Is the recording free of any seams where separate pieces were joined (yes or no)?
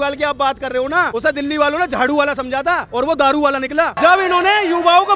no